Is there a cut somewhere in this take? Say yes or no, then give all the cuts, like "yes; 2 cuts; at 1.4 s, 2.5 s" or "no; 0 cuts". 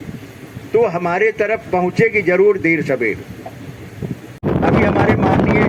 no; 0 cuts